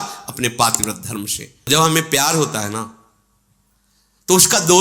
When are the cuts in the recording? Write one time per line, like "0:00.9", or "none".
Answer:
0:01.7